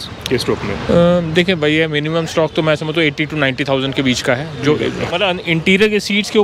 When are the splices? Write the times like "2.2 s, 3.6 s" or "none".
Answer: 5.0 s